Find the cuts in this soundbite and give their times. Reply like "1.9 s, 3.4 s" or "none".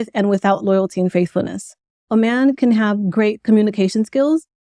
2.1 s